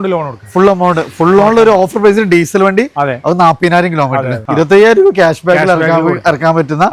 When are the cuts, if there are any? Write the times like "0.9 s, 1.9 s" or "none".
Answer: 4.4 s